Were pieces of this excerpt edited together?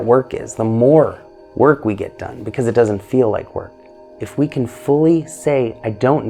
yes; 1 cut; at 4.2 s

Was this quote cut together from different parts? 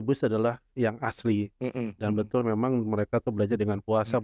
no; 0 cuts

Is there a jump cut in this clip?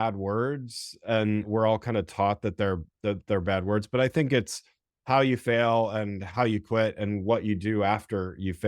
yes; 1 cut; at 1.5 s

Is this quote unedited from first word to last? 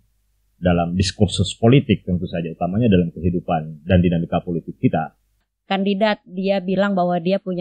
no; 1 cut; at 5.5 s

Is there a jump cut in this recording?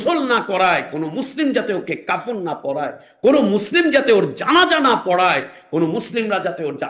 no; 0 cuts

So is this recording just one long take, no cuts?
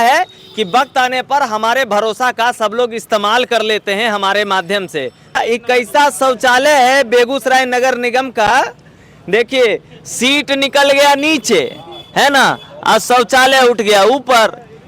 no; 1 cut; at 5.4 s

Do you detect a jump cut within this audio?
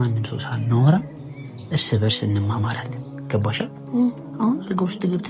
no; 0 cuts

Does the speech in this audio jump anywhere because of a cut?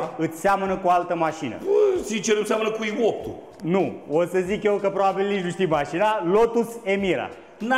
no; 0 cuts

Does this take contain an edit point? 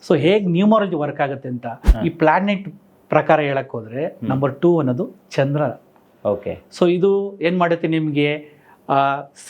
yes; 1 cut; at 1.8 s

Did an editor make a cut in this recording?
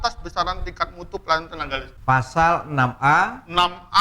yes; 1 cut; at 1.9 s

